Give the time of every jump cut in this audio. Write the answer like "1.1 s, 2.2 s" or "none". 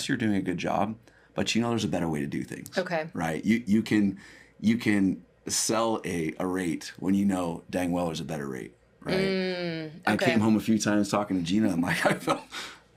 none